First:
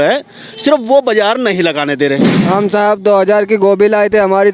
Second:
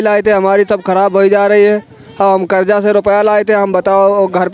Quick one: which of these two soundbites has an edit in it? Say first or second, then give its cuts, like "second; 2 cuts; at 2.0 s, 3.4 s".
first; 1 cut; at 2.5 s